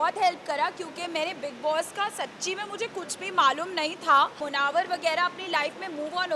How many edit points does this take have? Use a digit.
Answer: 1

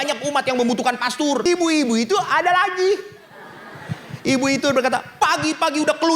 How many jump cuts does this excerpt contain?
1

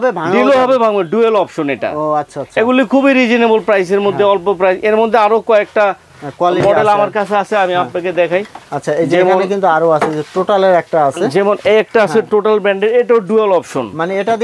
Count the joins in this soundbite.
0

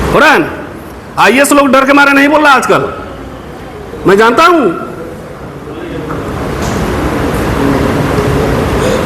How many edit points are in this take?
0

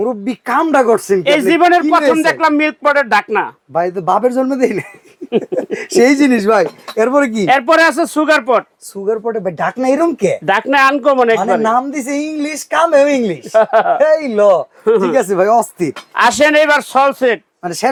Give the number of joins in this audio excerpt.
0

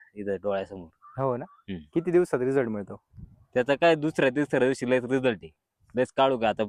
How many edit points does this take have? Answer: 0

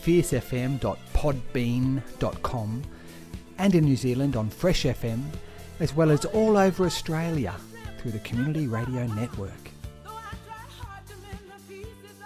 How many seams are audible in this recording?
1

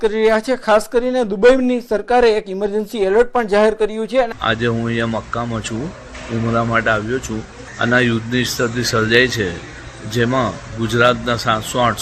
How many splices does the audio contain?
1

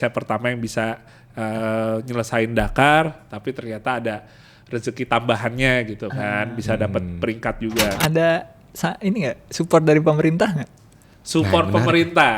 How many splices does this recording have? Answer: 1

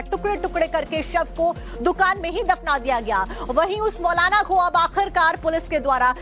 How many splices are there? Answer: 1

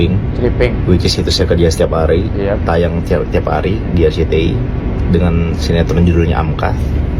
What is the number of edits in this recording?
0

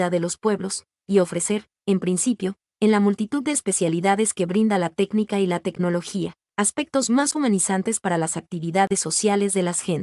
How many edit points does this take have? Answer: 0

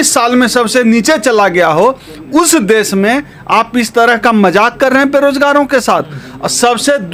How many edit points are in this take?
0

